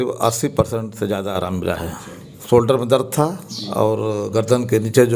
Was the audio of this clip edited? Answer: yes; 1 cut; at 2.3 s

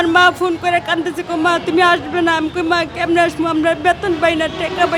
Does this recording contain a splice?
no; 0 cuts

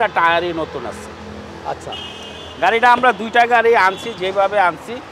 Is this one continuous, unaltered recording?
yes; 0 cuts

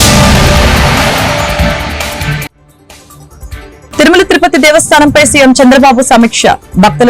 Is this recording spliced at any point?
yes; 1 cut; at 4.0 s

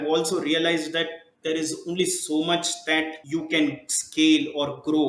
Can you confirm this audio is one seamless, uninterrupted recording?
yes; 0 cuts

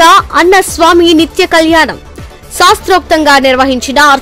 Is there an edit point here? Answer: no; 0 cuts

